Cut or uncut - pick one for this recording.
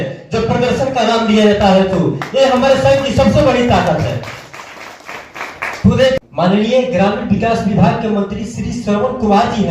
cut